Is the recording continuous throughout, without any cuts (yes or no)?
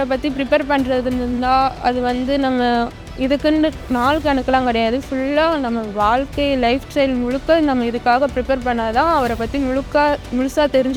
yes